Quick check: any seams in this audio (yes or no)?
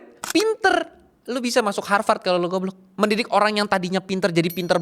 yes